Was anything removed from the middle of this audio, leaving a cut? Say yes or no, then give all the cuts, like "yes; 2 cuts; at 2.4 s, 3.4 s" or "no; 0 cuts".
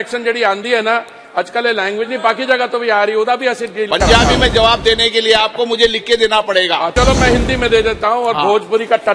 yes; 1 cut; at 6.9 s